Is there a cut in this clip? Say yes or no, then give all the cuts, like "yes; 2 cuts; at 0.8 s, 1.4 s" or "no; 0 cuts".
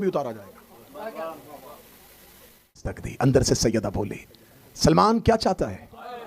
yes; 1 cut; at 2.8 s